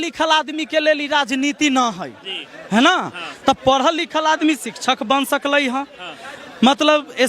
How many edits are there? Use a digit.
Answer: 0